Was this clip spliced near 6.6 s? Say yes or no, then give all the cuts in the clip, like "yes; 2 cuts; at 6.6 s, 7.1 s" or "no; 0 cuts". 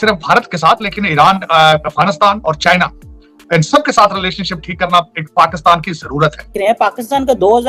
yes; 1 cut; at 6.6 s